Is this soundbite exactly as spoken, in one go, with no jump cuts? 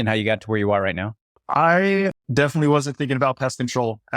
no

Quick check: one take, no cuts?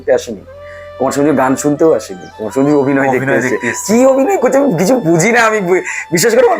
yes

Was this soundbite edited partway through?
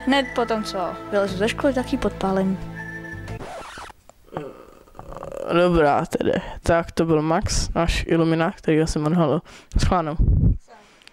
no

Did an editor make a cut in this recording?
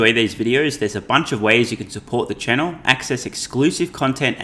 no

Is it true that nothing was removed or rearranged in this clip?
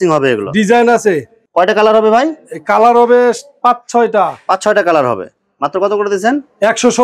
yes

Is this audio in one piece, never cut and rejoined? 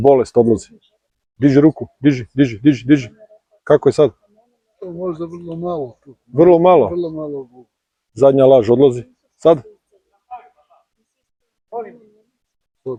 yes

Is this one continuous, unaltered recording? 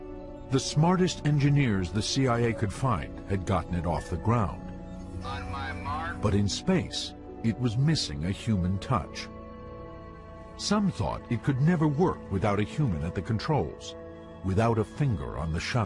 no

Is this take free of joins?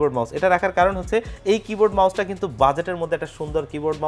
yes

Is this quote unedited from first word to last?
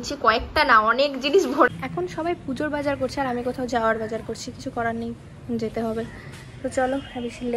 no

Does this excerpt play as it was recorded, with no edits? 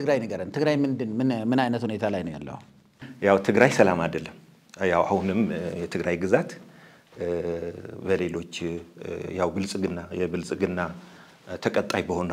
no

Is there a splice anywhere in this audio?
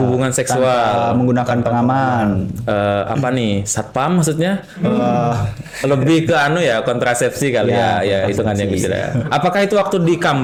no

